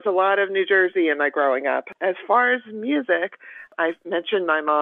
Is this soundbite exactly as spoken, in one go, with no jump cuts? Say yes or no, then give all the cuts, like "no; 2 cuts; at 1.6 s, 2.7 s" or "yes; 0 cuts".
no; 2 cuts; at 1.9 s, 3.7 s